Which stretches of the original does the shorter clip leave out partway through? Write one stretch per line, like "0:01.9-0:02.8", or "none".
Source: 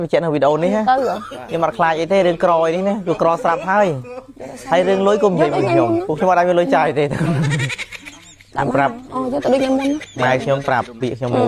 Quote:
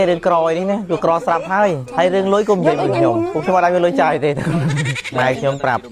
0:04.0-0:04.6
0:07.8-0:10.1

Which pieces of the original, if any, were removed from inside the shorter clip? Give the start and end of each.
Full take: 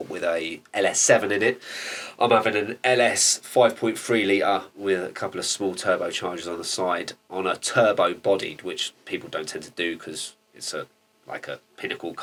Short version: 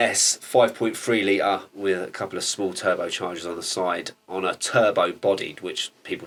none

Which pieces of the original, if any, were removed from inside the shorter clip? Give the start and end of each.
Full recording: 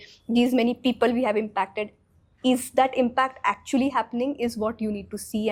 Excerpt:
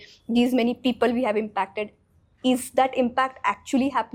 none

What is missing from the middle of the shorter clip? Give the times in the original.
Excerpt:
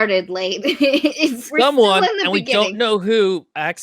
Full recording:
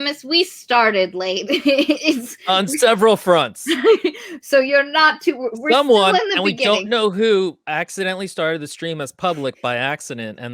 0:02.3-0:05.6

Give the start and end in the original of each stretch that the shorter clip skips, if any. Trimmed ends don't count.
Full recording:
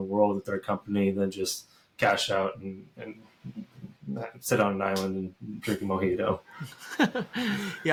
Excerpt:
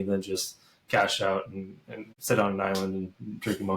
0:03.2-0:04.3

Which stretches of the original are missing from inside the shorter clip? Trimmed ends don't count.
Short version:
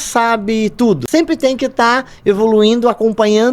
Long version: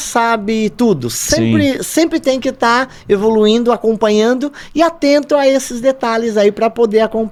0:01.0-0:01.9

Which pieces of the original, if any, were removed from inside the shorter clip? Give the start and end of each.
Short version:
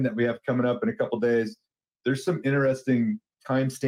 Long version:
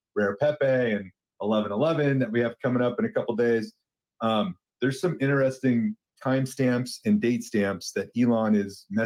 0:04.0-0:04.6

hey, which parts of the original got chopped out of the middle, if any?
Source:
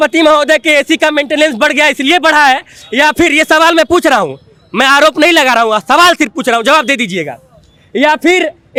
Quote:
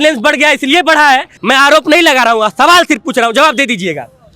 0:02.7-0:04.6

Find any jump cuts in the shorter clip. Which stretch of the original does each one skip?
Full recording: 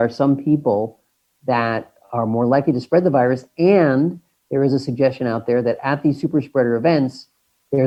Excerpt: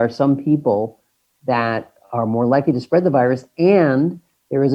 none

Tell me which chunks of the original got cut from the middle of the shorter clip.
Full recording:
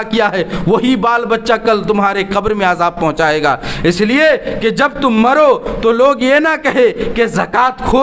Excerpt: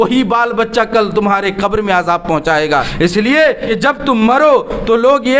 0:03.6-0:03.7
0:04.5-0:04.6

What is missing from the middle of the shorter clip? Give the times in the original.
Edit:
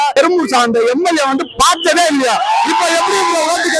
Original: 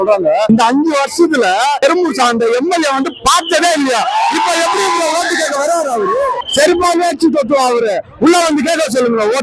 none

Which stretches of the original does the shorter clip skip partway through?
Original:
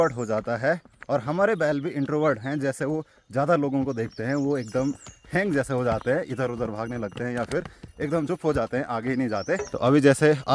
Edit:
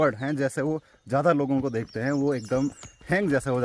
none

